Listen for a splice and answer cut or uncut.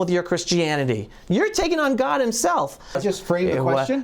cut